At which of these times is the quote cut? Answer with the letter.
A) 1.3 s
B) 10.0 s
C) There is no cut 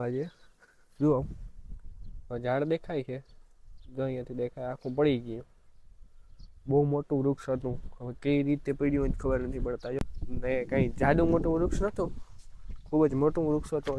B